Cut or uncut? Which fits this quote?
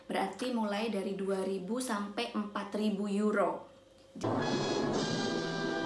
uncut